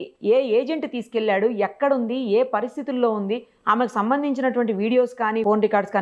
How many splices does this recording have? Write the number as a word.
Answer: zero